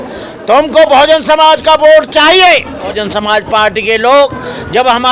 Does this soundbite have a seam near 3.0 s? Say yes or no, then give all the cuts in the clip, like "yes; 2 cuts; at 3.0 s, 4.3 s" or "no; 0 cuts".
yes; 1 cut; at 3.0 s